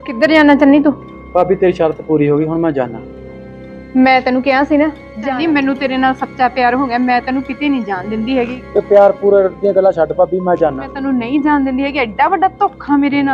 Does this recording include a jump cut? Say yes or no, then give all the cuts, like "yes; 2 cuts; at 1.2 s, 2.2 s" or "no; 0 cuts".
yes; 3 cuts; at 5.1 s, 8.6 s, 10.9 s